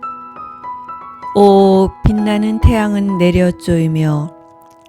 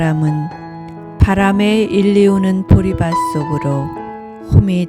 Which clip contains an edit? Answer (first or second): first